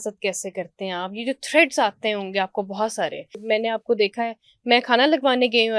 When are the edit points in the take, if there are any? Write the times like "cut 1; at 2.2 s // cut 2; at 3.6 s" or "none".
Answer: cut 1; at 3.4 s